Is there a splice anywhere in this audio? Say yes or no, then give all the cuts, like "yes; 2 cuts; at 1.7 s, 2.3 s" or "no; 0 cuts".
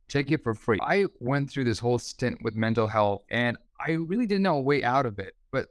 yes; 2 cuts; at 1.1 s, 3.2 s